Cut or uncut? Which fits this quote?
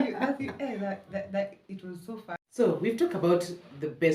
cut